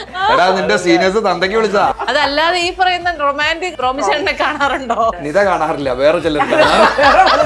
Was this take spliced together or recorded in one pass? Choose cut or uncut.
cut